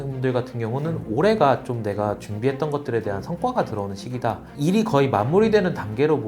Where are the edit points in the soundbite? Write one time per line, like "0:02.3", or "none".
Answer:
0:04.5